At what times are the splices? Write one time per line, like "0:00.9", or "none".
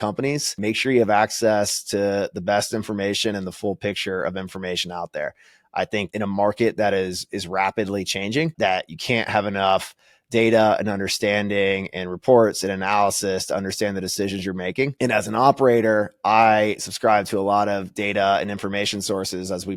none